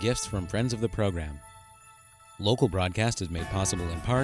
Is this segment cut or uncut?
uncut